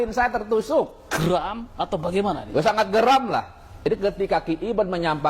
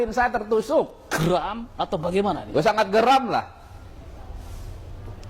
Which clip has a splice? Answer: first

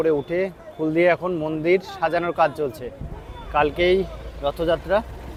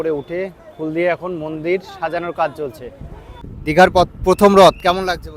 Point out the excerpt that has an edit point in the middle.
second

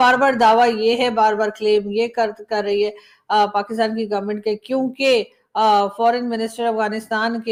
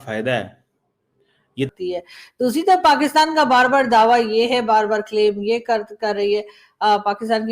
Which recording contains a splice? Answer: second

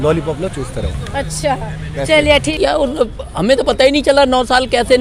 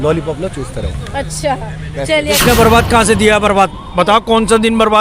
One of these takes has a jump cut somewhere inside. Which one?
second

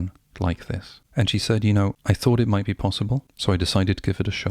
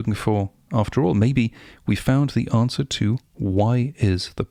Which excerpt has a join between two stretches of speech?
first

